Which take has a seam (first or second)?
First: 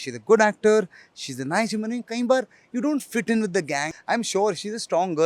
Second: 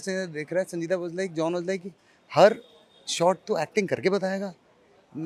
first